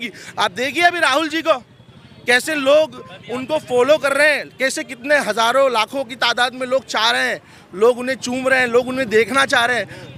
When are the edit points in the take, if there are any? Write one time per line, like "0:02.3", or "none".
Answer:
none